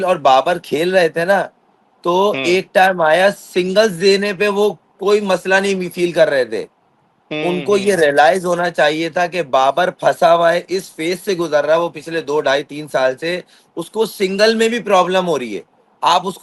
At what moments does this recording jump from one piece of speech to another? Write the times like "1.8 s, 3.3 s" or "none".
none